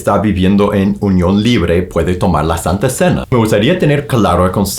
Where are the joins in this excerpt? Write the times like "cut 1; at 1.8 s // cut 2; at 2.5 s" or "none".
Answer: cut 1; at 3.3 s